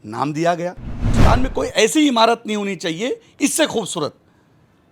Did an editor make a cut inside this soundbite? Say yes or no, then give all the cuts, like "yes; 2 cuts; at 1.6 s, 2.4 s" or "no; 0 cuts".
yes; 1 cut; at 1.1 s